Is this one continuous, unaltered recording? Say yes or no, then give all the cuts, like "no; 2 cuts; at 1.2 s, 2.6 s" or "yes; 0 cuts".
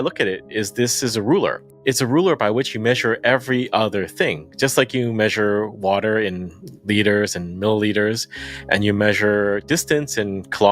no; 1 cut; at 1.7 s